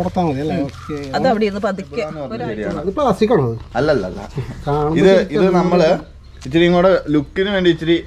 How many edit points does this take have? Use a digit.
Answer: 1